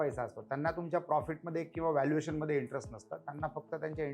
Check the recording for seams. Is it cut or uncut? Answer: uncut